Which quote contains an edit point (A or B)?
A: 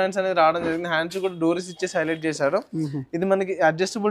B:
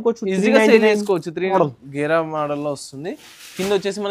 B